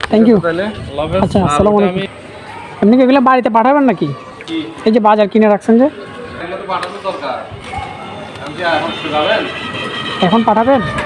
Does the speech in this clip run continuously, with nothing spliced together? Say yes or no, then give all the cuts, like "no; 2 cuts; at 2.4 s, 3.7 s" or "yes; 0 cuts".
yes; 0 cuts